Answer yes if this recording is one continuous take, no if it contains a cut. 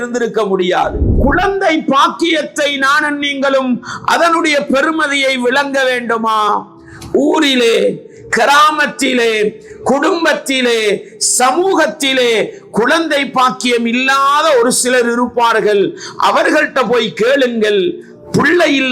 no